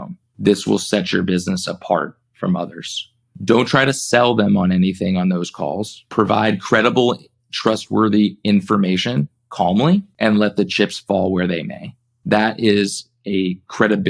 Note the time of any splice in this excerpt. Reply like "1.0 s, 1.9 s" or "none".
6.0 s, 10.1 s